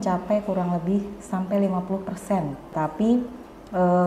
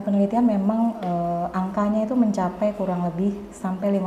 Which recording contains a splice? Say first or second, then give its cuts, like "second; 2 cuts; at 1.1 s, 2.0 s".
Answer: first; 1 cut; at 2.7 s